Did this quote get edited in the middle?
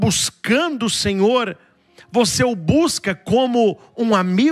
no; 0 cuts

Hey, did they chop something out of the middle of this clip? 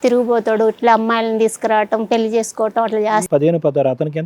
yes; 1 cut; at 3.2 s

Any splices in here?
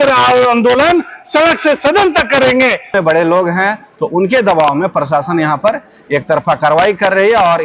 yes; 1 cut; at 2.9 s

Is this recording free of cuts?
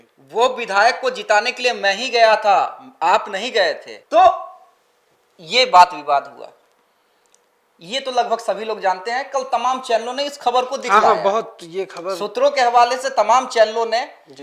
yes; 0 cuts

